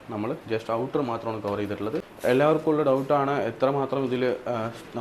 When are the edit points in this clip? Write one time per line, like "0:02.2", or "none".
0:02.1